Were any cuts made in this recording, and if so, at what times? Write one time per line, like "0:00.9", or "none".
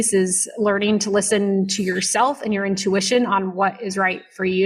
none